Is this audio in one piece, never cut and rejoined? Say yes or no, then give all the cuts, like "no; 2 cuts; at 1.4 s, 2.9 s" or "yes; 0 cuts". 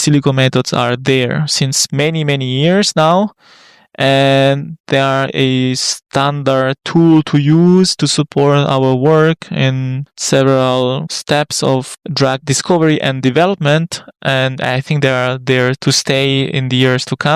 yes; 0 cuts